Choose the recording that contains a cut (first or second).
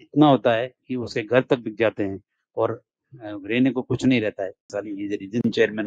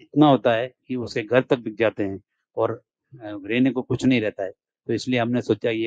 first